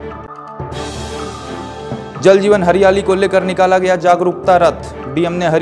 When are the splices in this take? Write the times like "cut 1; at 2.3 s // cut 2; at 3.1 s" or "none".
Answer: cut 1; at 2.1 s